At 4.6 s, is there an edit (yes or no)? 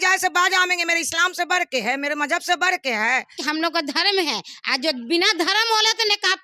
no